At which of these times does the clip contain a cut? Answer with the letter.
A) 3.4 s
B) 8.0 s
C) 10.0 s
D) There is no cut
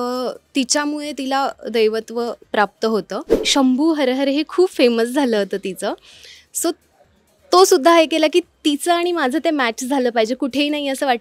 A